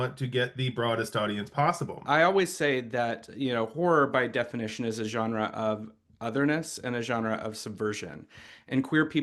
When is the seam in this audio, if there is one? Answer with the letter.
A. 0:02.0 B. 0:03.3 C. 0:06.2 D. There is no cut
A